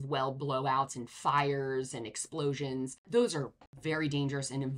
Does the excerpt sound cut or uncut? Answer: cut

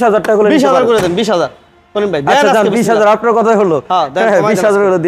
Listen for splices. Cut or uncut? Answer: uncut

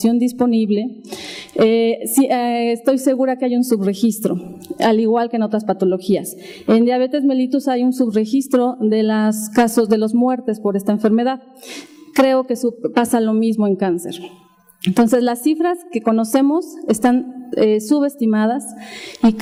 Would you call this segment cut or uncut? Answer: uncut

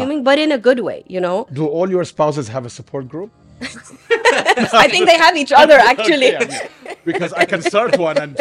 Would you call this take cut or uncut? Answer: uncut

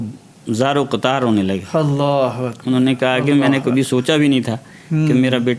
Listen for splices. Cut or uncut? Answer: uncut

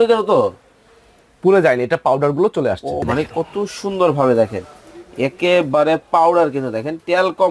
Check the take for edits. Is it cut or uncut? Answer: cut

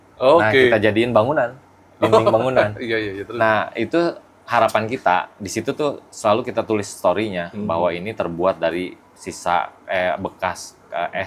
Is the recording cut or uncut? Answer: uncut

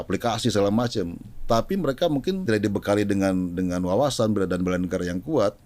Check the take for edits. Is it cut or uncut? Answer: cut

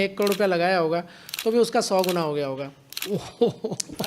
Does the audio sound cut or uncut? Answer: cut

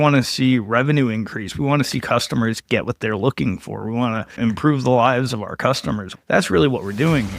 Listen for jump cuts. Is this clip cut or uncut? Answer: cut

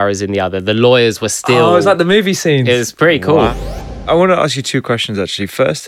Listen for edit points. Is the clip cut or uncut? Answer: cut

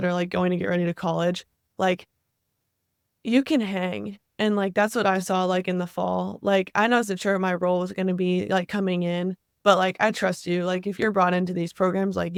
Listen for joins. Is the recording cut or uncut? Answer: uncut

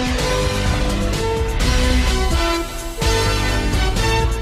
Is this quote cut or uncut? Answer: uncut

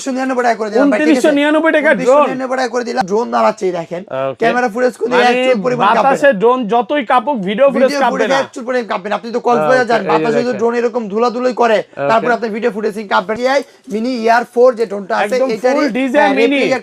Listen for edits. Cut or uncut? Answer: cut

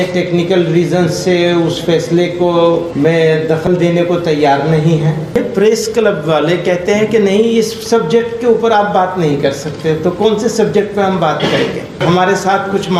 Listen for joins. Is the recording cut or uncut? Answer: cut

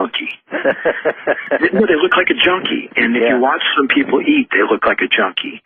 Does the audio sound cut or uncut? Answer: uncut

